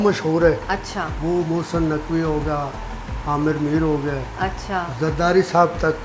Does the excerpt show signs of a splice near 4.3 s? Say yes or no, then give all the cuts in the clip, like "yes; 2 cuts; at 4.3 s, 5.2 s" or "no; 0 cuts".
no; 1 cut; at 1.1 s